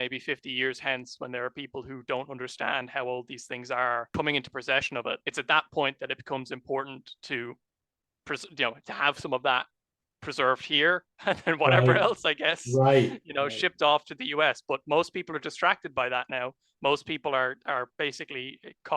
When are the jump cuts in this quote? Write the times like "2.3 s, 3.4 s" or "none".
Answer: 4.1 s, 5.2 s